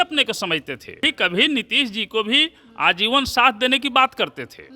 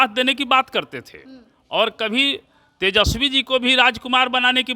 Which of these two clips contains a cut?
first; 1 cut; at 1.0 s

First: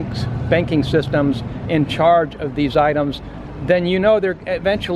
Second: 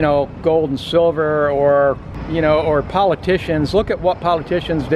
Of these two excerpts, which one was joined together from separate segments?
second; 1 cut; at 2.1 s

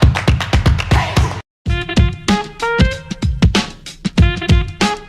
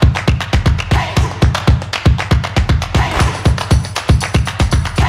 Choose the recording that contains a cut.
first; 1 cut; at 1.3 s

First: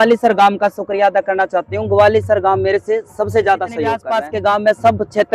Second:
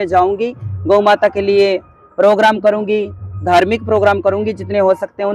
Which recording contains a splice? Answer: first; 1 cut; at 4.0 s

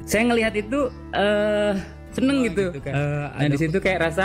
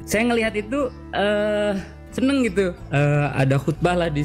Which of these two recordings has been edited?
first; 1 cut; at 3.2 s

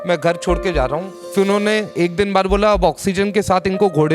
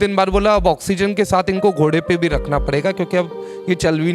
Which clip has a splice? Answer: first; 1 cut; at 1.2 s

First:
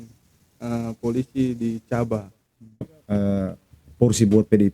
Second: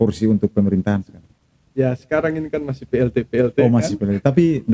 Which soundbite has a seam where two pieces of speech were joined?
first; 1 cut; at 2.9 s

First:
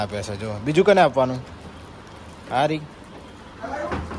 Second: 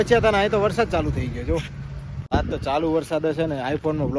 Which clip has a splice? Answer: second; 1 cut; at 2.3 s

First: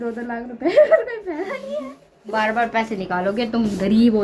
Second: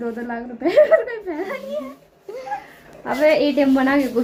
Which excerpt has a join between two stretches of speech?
first; 1 cut; at 2.3 s

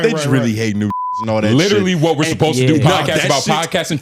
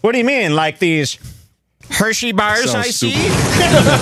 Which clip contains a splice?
first; 1 cut; at 1.0 s

